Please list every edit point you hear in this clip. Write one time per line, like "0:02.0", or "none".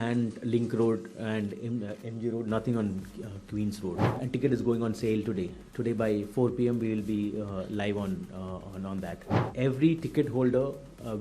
0:04.2
0:09.5